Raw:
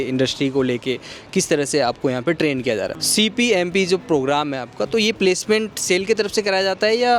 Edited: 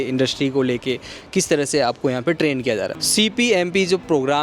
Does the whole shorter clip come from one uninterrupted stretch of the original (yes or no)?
yes